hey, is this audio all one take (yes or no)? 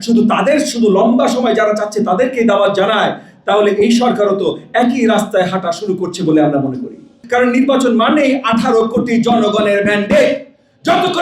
no